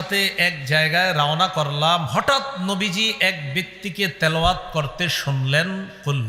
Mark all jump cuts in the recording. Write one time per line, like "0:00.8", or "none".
none